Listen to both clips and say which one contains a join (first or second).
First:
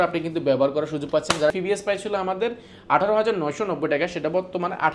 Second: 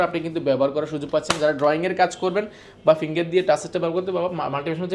first